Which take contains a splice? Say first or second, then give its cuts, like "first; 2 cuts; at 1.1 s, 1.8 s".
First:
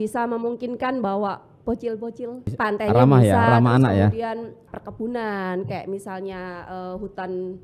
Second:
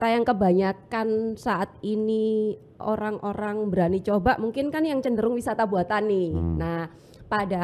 first; 2 cuts; at 2.5 s, 4.6 s